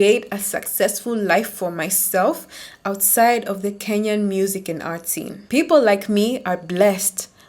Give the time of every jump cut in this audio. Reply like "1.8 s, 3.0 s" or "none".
5.3 s